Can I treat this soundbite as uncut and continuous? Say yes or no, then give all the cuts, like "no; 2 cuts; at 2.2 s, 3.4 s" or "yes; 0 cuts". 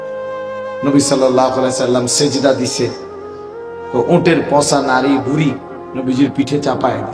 yes; 0 cuts